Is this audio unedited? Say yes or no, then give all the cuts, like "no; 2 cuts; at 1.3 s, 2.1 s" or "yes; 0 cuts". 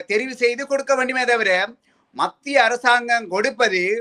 yes; 0 cuts